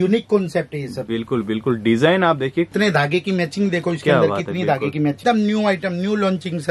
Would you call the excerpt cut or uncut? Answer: cut